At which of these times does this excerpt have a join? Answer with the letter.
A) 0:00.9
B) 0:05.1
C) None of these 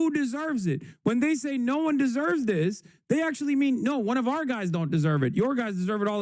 C